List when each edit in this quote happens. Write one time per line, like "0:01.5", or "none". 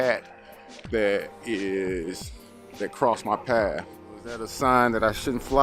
0:04.5

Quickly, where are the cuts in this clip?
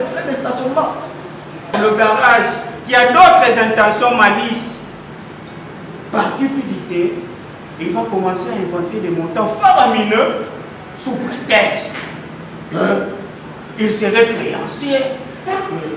0:01.6

